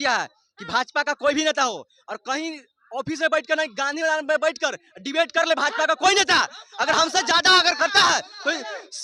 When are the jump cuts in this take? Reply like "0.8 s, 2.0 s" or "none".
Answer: none